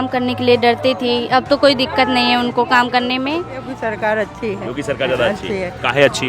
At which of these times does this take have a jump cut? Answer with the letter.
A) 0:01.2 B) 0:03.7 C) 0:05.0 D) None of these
B